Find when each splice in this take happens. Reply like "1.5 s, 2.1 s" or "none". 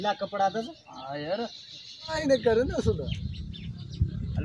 2.1 s